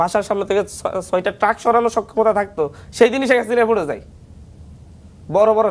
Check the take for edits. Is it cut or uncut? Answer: uncut